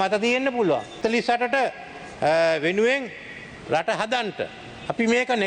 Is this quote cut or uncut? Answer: cut